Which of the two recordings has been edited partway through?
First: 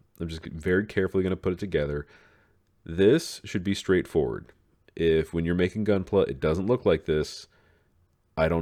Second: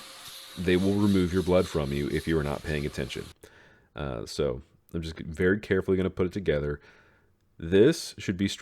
second; 1 cut; at 3.3 s

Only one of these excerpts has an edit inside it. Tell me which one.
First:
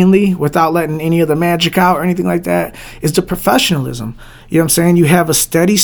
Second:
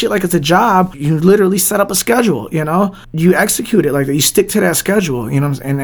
second; 2 cuts; at 1.0 s, 3.0 s

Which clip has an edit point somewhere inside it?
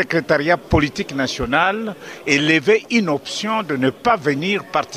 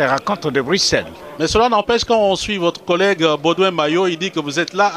second; 1 cut; at 1.9 s

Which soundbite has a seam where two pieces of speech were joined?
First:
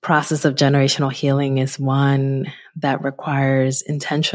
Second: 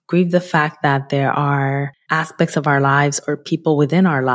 second; 1 cut; at 2.0 s

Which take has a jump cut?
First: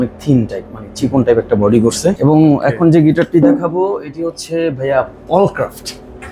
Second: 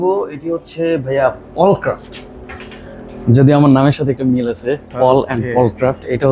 first; 1 cut; at 2.2 s

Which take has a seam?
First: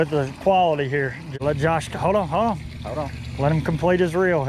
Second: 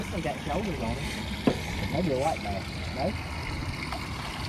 first; 1 cut; at 1.3 s

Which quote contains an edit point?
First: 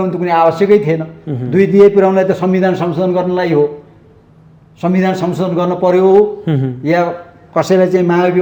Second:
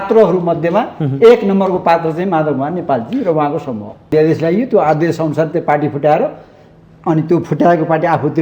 second; 1 cut; at 4.1 s

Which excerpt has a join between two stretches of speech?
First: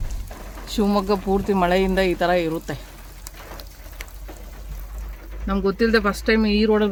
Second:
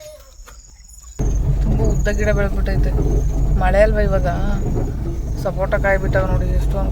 second; 1 cut; at 1.2 s

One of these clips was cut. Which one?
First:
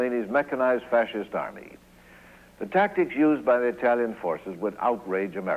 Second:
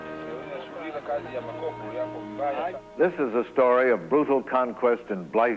first; 1 cut; at 3.4 s

